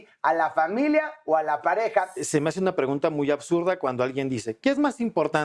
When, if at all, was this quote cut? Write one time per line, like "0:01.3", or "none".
0:02.2